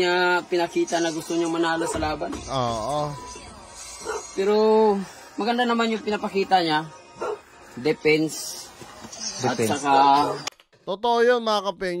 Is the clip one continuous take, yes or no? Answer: yes